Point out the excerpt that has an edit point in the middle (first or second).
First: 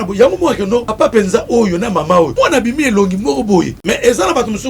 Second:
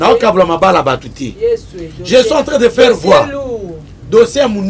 first